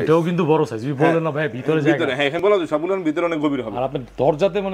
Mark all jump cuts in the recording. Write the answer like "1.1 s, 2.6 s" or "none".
none